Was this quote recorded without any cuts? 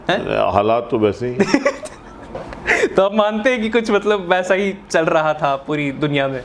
yes; 0 cuts

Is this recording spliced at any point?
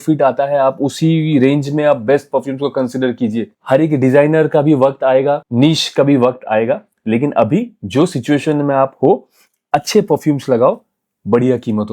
no; 0 cuts

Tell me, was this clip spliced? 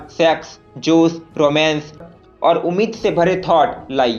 no; 0 cuts

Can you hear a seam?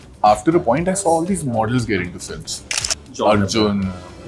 no; 0 cuts

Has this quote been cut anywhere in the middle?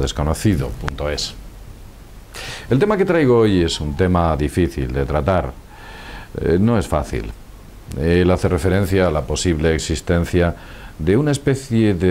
no; 0 cuts

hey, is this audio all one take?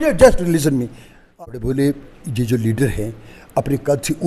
no; 1 cut; at 1.3 s

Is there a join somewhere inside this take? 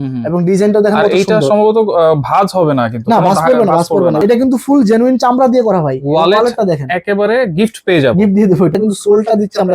yes; 2 cuts; at 4.2 s, 8.8 s

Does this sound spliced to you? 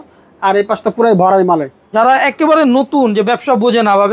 yes; 1 cut; at 1.9 s

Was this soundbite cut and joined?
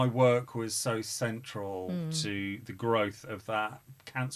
no; 0 cuts

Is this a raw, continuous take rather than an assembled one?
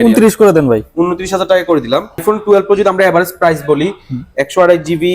no; 1 cut; at 2.2 s

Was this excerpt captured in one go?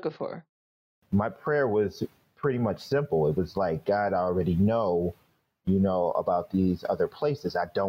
no; 1 cut; at 0.9 s

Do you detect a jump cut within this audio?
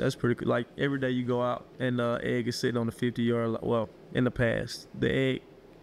no; 0 cuts

